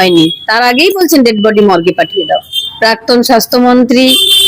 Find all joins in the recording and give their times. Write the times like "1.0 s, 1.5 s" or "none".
2.6 s